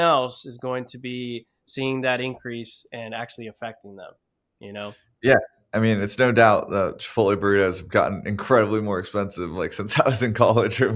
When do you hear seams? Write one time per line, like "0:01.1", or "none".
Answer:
none